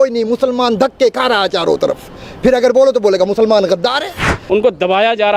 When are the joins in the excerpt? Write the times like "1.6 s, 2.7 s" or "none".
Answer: 4.3 s